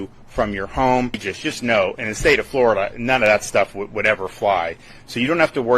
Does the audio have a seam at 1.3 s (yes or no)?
yes